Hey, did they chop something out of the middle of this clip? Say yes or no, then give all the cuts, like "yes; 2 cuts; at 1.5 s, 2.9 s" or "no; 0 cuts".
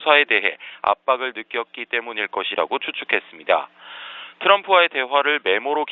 yes; 1 cut; at 5.0 s